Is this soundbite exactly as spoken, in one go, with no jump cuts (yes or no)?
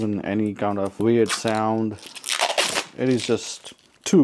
yes